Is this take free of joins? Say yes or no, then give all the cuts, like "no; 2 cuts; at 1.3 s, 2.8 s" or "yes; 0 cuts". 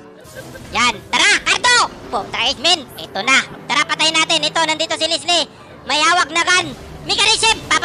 no; 1 cut; at 3.8 s